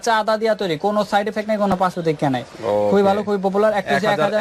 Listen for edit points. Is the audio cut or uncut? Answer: uncut